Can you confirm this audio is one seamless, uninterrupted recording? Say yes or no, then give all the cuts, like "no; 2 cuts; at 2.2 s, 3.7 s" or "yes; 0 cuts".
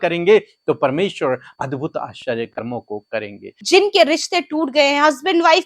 no; 1 cut; at 3.5 s